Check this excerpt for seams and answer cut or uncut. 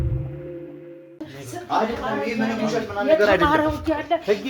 cut